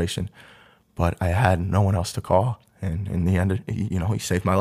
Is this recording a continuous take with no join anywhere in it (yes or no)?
yes